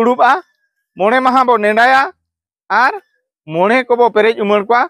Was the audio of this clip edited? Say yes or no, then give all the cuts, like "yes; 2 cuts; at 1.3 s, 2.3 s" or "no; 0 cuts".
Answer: no; 0 cuts